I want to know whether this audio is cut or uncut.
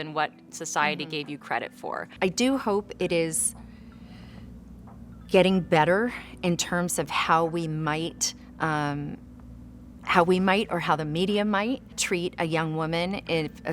cut